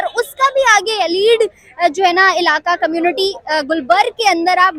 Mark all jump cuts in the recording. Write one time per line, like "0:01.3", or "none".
none